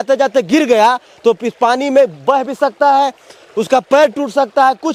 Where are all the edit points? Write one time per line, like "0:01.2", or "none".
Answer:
none